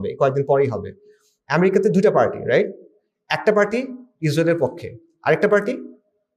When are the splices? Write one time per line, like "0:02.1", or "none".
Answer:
none